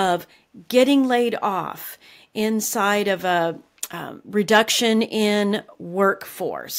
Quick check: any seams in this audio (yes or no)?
no